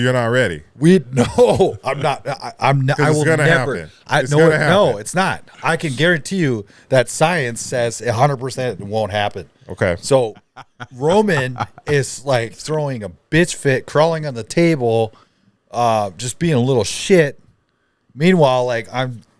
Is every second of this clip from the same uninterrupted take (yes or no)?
no